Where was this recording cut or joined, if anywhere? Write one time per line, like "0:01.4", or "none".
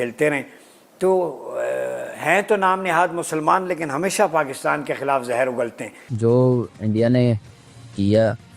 0:06.1